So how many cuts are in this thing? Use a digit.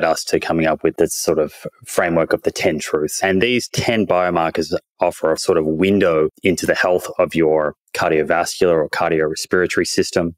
4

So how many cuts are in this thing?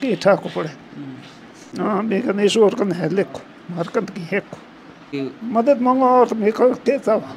2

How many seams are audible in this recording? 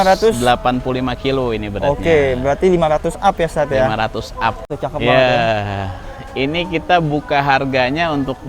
1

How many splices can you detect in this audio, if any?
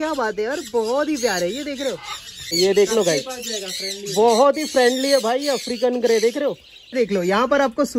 2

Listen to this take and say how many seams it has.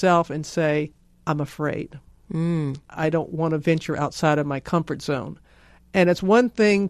1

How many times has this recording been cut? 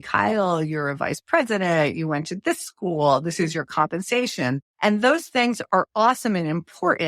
1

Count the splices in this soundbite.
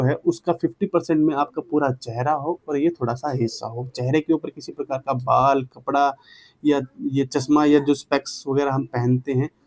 0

